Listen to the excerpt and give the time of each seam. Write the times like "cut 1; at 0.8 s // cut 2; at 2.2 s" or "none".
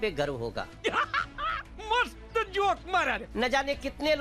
cut 1; at 3.3 s